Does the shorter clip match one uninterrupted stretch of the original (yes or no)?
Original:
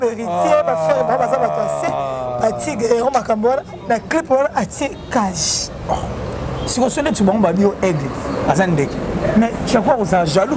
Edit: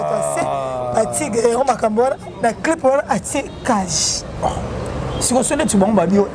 yes